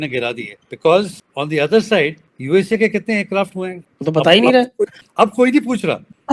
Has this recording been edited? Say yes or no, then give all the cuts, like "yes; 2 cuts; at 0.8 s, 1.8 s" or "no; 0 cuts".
yes; 1 cut; at 5.0 s